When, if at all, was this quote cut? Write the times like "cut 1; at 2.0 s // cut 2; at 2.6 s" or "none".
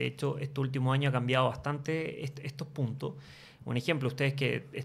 none